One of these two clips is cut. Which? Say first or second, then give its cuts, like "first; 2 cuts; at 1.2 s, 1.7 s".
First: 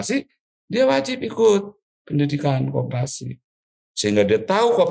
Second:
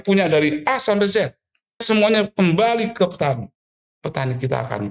second; 1 cut; at 1.8 s